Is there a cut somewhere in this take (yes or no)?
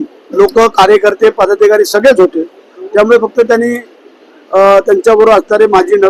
no